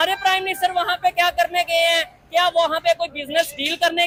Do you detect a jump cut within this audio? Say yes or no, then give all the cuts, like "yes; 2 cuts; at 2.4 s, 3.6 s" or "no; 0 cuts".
no; 0 cuts